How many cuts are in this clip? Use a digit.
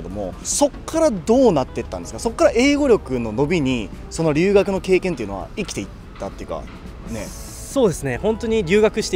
0